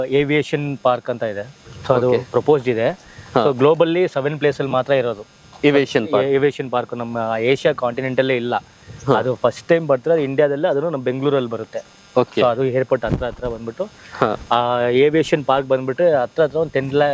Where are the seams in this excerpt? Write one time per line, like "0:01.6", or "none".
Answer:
none